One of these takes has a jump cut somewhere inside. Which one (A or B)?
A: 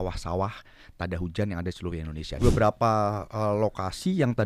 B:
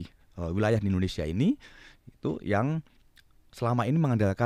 A